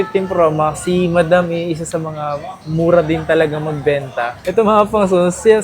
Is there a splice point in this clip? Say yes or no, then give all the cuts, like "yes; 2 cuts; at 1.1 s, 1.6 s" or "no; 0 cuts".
yes; 1 cut; at 4.4 s